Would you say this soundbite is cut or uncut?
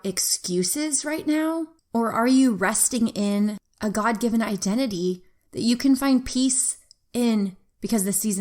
cut